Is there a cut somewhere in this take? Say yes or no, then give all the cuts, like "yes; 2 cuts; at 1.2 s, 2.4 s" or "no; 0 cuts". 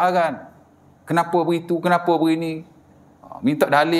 no; 0 cuts